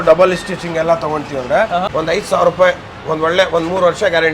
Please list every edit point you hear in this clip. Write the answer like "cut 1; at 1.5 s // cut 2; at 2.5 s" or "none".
cut 1; at 1.9 s